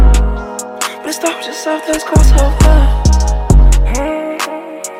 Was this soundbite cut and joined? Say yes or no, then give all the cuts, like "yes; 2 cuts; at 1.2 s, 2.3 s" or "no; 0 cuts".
no; 0 cuts